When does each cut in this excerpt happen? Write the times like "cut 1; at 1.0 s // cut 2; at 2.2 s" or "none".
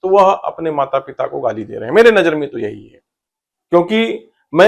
none